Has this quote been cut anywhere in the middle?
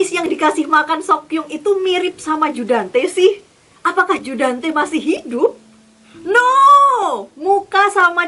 no; 0 cuts

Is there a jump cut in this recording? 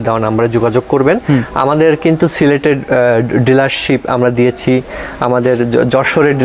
no; 0 cuts

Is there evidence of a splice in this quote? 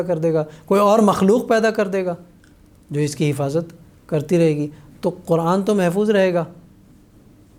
no; 0 cuts

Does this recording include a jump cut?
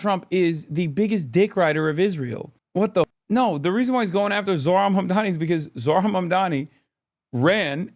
yes; 1 cut; at 3.1 s

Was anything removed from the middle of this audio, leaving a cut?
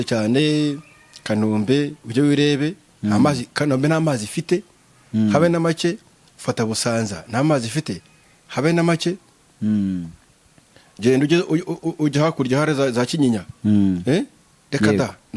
no; 0 cuts

